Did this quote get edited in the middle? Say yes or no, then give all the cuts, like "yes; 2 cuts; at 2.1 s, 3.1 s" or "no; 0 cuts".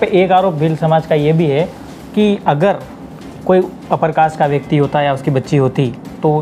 no; 0 cuts